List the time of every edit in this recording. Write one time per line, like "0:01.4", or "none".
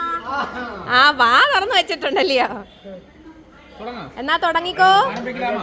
none